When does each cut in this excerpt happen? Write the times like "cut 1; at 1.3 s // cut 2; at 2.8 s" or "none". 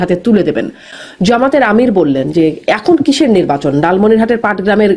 cut 1; at 0.9 s